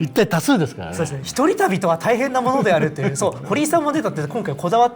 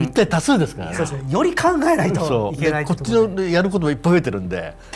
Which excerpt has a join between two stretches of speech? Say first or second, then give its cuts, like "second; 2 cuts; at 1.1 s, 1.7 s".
first; 1 cut; at 1.2 s